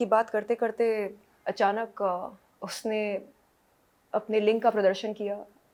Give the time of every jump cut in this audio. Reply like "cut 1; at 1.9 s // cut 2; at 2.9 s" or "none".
none